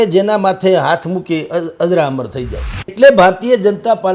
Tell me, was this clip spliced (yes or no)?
yes